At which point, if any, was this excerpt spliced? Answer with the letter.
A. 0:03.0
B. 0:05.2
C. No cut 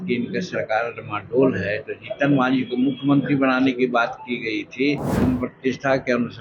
B